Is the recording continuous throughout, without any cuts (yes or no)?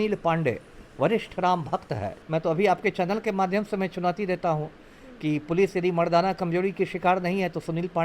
no